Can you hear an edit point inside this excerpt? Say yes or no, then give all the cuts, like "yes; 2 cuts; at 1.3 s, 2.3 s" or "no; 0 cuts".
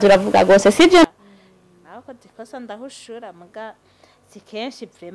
yes; 1 cut; at 1.0 s